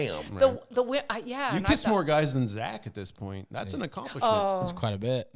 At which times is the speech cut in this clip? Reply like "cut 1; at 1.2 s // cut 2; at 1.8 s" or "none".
none